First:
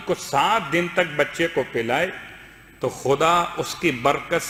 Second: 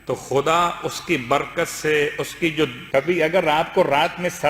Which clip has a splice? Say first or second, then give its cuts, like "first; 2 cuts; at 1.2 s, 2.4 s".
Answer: second; 1 cut; at 2.8 s